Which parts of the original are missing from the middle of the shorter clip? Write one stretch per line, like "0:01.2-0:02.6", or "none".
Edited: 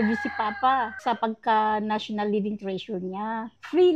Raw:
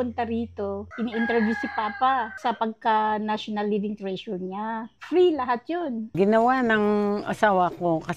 none

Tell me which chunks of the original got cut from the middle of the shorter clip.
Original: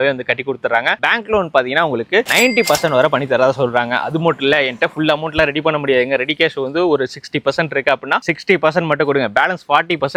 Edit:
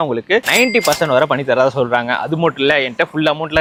none

